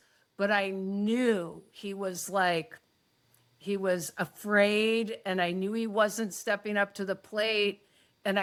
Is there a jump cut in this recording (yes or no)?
no